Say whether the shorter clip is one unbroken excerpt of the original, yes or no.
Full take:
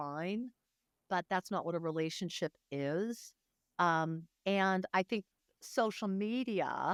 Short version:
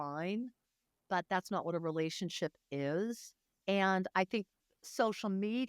no